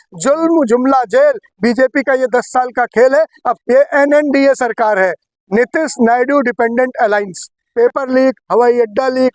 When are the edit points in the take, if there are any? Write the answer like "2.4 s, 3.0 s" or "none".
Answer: 3.5 s, 7.6 s